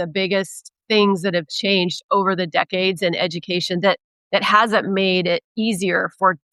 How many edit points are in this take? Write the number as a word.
zero